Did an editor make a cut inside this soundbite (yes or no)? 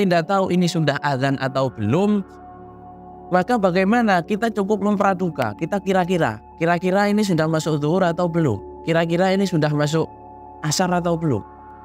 no